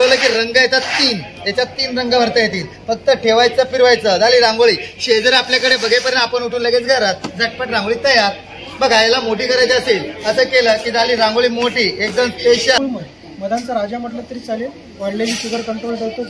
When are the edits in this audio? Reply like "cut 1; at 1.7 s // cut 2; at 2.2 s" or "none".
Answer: cut 1; at 12.8 s

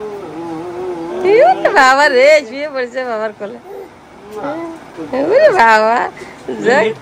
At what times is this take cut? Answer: cut 1; at 4.9 s

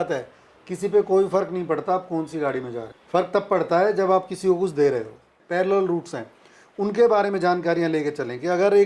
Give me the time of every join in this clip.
cut 1; at 2.9 s // cut 2; at 5.4 s

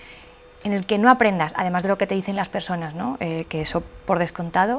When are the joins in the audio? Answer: none

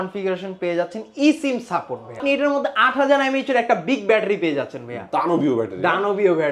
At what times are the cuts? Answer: cut 1; at 2.2 s

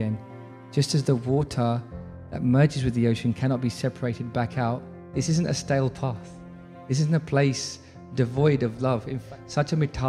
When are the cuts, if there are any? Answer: cut 1; at 5.0 s // cut 2; at 9.2 s

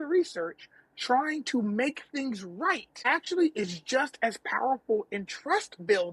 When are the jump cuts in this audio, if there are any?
cut 1; at 3.0 s

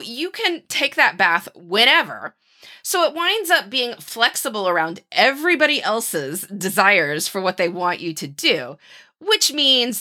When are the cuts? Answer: none

